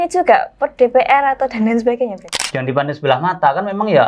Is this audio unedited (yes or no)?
no